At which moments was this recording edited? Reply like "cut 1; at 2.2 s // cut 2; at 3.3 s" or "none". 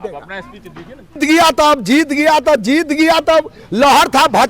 cut 1; at 1.2 s